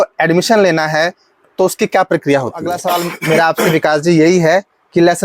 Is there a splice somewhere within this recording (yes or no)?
yes